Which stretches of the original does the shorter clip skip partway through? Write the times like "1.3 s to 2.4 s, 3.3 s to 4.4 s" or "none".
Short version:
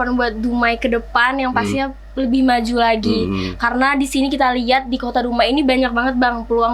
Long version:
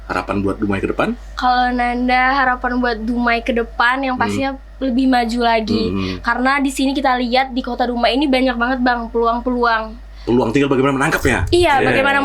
none